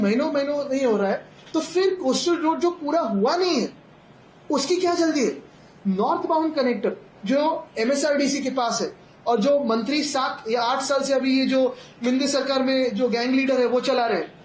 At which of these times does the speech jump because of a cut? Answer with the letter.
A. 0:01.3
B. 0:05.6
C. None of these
B